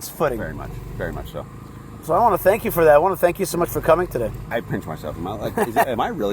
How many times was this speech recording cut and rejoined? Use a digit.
1